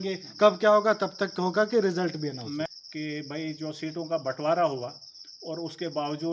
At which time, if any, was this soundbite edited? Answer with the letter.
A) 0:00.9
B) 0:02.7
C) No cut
B